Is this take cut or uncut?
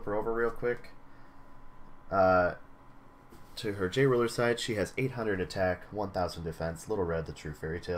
uncut